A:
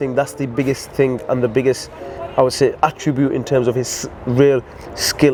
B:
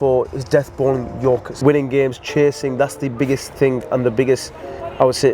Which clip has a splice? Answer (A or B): B